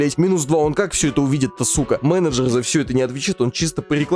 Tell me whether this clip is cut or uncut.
cut